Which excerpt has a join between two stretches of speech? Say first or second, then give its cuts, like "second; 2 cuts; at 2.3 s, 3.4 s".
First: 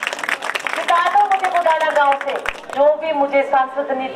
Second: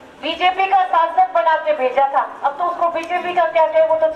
first; 1 cut; at 2.6 s